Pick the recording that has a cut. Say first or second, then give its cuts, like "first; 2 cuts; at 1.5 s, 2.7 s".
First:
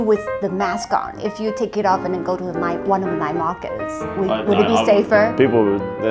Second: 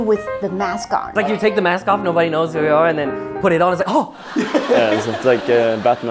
second; 1 cut; at 1.1 s